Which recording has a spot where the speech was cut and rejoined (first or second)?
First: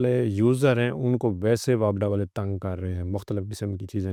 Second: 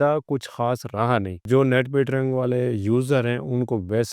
second